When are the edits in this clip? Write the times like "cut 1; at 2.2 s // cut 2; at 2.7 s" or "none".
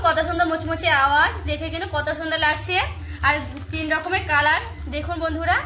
none